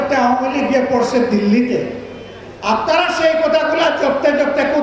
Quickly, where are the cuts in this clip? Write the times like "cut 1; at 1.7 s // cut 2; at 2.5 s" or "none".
none